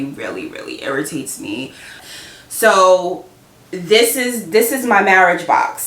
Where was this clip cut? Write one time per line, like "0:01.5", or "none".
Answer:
0:02.1